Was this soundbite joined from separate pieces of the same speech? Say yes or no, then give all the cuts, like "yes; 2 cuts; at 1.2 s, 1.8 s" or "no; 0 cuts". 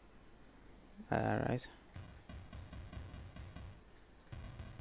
no; 0 cuts